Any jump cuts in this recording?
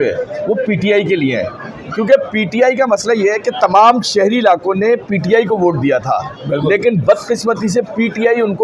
no; 0 cuts

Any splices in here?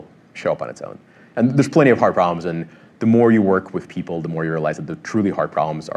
no; 0 cuts

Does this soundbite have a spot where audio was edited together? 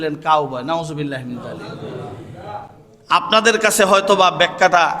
no; 0 cuts

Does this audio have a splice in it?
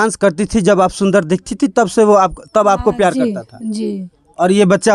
no; 0 cuts

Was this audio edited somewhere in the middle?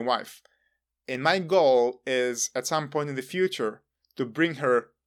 no; 0 cuts

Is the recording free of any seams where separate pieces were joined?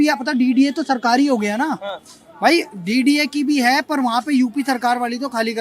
yes; 0 cuts

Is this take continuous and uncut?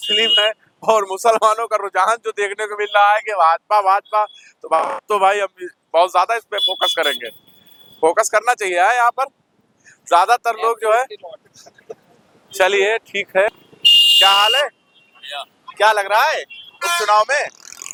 yes; 0 cuts

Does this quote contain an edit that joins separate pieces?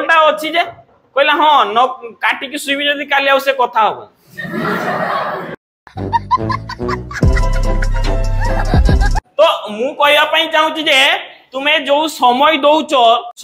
no; 0 cuts

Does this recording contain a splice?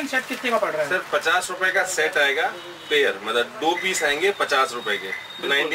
no; 0 cuts

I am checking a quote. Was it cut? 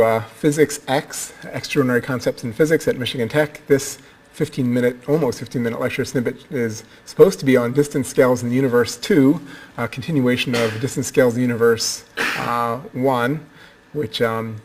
yes; 1 cut; at 5.1 s

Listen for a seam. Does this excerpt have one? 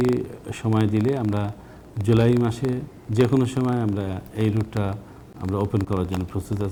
no; 0 cuts

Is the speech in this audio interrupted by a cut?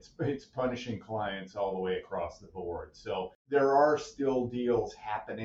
yes; 1 cut; at 3.4 s

